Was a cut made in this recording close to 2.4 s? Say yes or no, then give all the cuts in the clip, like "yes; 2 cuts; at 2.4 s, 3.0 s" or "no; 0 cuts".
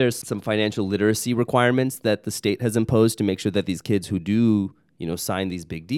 no; 0 cuts